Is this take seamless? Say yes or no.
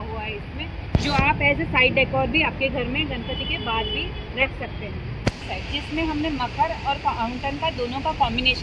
no